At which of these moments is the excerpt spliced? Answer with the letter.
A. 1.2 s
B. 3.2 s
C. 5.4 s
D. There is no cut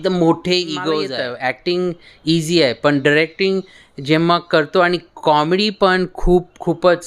A